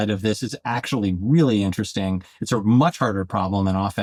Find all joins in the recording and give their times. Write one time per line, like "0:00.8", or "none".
none